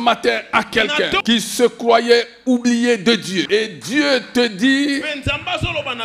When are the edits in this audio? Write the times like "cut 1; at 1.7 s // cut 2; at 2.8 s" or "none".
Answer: cut 1; at 1.2 s // cut 2; at 3.5 s